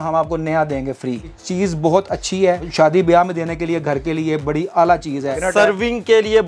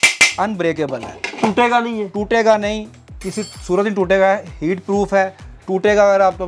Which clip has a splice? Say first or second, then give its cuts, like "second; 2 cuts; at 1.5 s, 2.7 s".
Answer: first; 3 cuts; at 1.4 s, 2.7 s, 5.4 s